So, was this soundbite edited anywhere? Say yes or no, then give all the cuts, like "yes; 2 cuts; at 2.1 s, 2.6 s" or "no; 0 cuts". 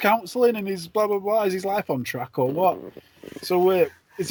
no; 0 cuts